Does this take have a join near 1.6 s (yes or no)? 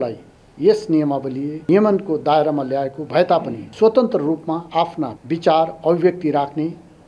yes